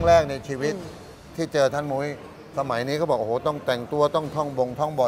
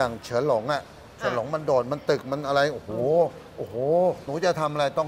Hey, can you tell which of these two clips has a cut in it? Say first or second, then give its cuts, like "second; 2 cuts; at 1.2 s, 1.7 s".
second; 2 cuts; at 0.9 s, 4.2 s